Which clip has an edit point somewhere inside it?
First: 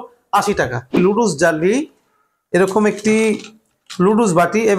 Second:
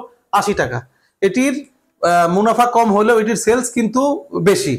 first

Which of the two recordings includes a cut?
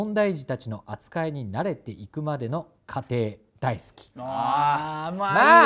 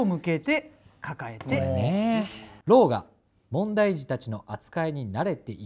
second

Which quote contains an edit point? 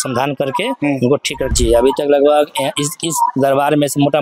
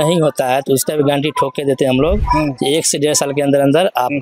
first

